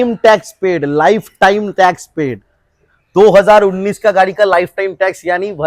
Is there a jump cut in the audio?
no; 0 cuts

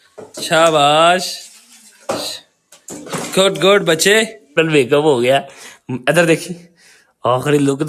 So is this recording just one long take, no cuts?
no; 1 cut; at 4.6 s

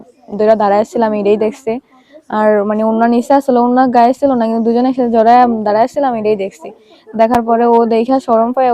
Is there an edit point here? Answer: no; 0 cuts

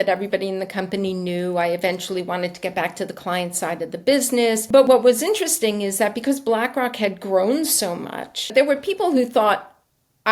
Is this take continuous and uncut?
no; 2 cuts; at 4.8 s, 8.5 s

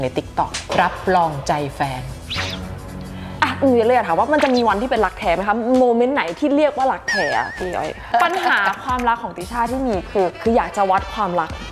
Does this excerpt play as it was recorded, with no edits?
no; 3 cuts; at 3.2 s, 8.0 s, 10.4 s

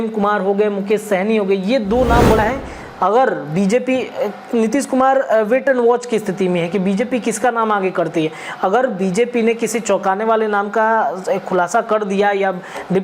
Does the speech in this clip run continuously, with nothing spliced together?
no; 1 cut; at 2.4 s

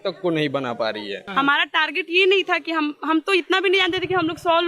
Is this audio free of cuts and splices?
no; 1 cut; at 1.2 s

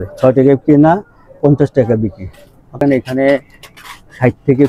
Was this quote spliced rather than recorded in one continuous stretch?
yes; 1 cut; at 2.8 s

